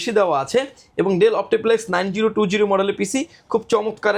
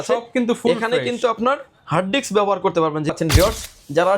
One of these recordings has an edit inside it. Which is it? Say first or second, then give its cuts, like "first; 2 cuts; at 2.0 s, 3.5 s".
second; 1 cut; at 3.1 s